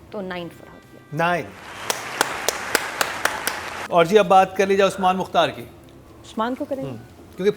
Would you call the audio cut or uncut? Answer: uncut